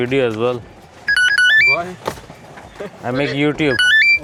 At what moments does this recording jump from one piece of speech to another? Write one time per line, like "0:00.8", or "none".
none